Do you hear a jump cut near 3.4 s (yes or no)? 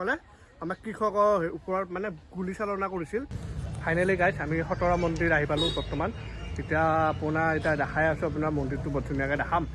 yes